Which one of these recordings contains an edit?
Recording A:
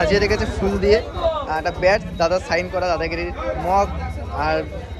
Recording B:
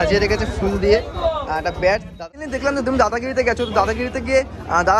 B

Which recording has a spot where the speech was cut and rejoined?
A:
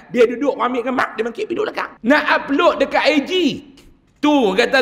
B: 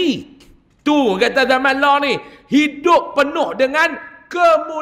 A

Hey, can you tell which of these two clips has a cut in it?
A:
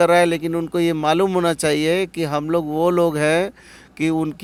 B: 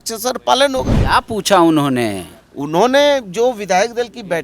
B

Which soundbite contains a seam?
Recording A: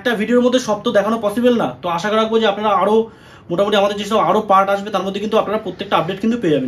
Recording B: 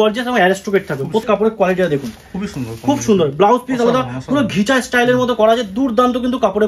B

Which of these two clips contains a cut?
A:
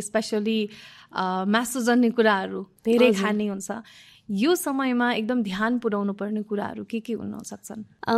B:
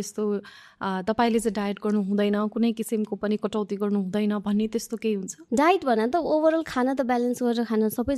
B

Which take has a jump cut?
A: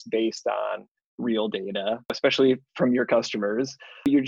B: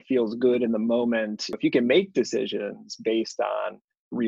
B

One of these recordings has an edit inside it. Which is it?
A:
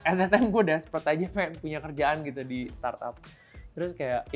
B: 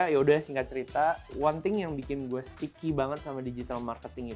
B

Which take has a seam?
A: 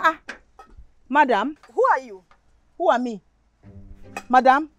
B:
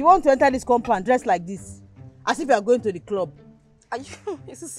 A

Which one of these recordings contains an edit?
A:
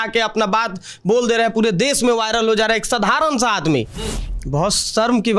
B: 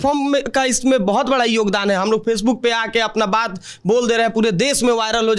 A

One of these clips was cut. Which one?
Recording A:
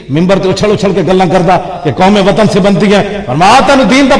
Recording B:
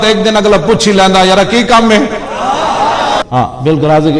B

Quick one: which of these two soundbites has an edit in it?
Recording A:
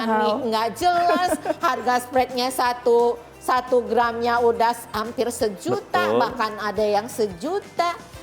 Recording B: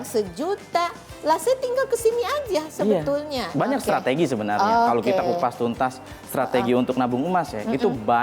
B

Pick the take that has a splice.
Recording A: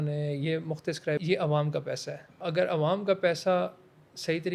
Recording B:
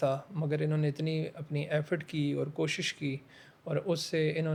A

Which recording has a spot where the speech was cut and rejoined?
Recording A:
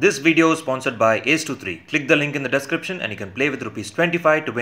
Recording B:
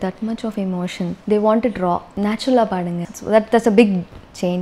B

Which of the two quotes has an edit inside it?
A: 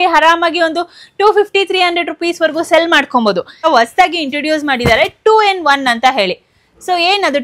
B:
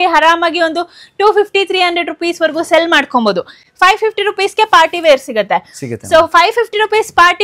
A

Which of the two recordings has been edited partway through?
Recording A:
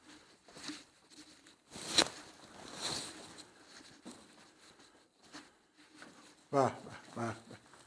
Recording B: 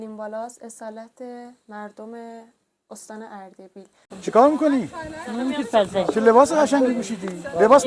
B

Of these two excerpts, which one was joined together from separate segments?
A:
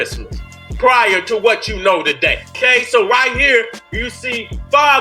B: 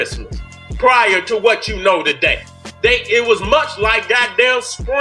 A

